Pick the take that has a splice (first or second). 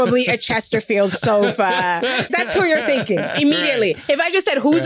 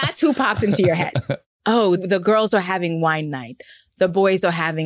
second